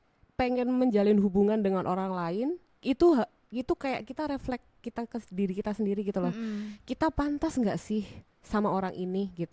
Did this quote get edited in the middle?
no; 0 cuts

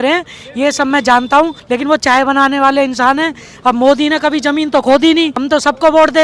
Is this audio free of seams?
no; 2 cuts; at 1.6 s, 5.4 s

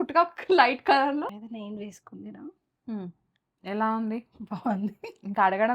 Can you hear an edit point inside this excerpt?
yes; 1 cut; at 1.3 s

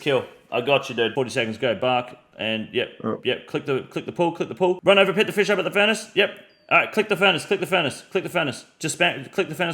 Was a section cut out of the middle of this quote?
yes; 2 cuts; at 1.1 s, 4.8 s

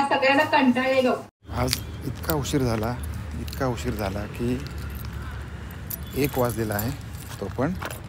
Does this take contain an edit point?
yes; 1 cut; at 1.2 s

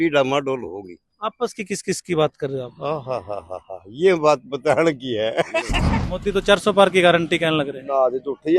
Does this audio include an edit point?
yes; 1 cut; at 5.8 s

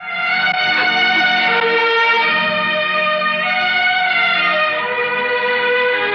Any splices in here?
no; 0 cuts

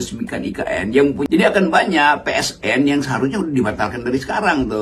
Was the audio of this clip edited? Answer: yes; 1 cut; at 1.2 s

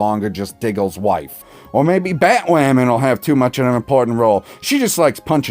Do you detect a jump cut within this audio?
yes; 1 cut; at 1.5 s

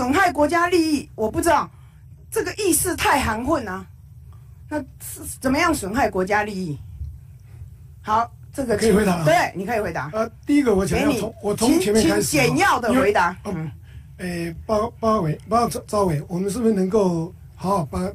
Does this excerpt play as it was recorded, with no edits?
yes; 0 cuts

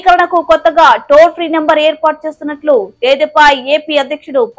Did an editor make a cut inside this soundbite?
no; 0 cuts

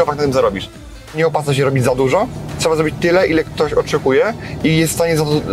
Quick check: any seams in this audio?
yes; 1 cut; at 1.1 s

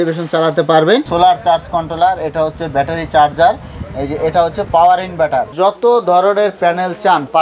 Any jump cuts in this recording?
yes; 2 cuts; at 1.0 s, 5.5 s

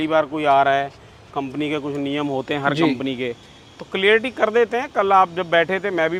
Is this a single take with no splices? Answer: yes; 0 cuts

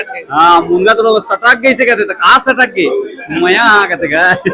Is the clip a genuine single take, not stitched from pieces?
yes; 0 cuts

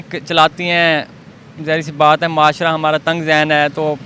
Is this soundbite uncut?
yes; 0 cuts

